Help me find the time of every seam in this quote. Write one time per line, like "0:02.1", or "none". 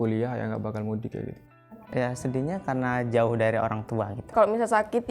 0:01.8
0:04.3